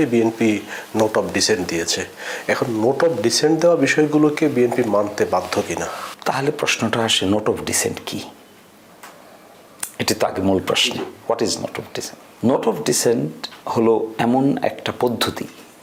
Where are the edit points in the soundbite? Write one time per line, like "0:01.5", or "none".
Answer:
none